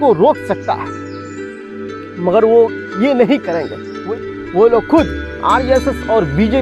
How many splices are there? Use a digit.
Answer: 1